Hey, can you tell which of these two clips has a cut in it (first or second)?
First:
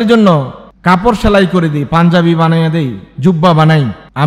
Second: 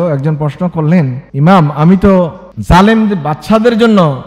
second